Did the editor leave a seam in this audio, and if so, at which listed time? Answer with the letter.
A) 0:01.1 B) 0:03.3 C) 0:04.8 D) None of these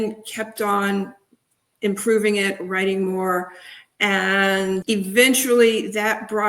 C